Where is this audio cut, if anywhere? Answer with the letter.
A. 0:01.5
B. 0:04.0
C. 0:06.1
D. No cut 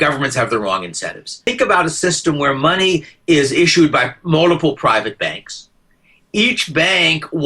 A